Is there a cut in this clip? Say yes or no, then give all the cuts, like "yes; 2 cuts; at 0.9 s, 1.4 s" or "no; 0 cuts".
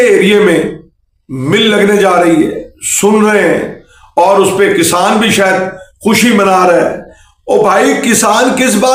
no; 0 cuts